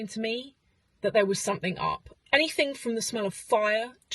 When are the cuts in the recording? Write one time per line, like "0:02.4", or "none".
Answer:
0:02.1